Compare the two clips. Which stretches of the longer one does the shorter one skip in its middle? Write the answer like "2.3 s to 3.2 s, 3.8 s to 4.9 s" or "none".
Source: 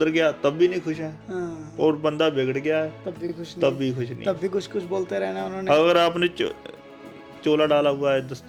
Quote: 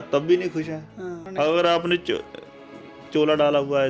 1.5 s to 5.5 s